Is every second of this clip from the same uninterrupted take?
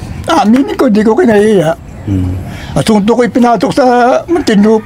yes; 0 cuts

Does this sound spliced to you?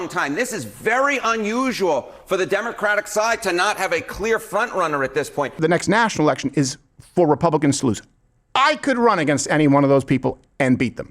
yes; 1 cut; at 5.6 s

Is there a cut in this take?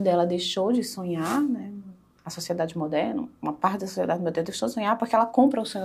no; 0 cuts

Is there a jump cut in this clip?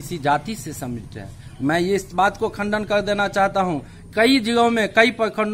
no; 0 cuts

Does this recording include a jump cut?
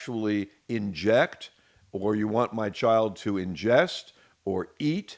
no; 0 cuts

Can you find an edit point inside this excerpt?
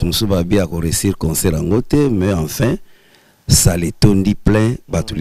no; 0 cuts

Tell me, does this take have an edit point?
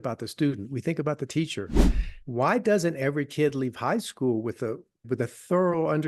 yes; 2 cuts; at 2.1 s, 5.0 s

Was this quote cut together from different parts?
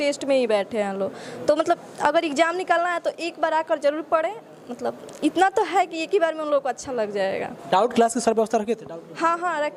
no; 0 cuts

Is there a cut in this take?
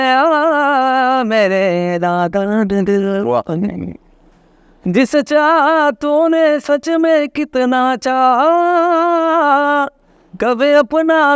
no; 0 cuts

